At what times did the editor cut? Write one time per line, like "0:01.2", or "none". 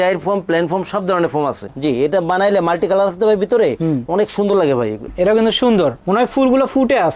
0:01.7
0:05.0